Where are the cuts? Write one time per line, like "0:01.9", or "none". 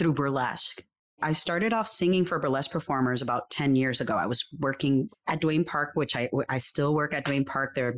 0:01.2
0:05.1